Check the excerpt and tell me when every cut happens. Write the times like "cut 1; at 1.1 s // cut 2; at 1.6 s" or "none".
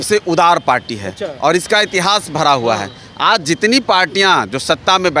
none